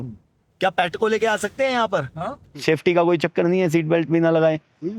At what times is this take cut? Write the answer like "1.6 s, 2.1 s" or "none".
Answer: 2.5 s